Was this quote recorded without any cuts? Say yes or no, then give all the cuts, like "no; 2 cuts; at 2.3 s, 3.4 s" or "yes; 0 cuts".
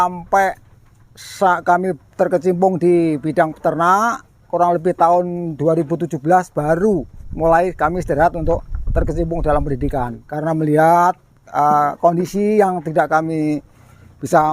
no; 1 cut; at 10.2 s